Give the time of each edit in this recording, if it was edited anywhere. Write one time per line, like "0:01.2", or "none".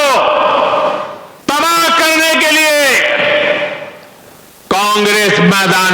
0:01.2